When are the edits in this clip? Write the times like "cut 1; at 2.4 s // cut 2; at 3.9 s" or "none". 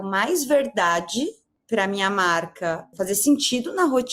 cut 1; at 1.5 s // cut 2; at 2.9 s